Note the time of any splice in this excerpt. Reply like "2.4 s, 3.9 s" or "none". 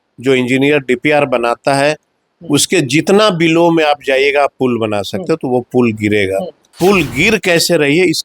6.7 s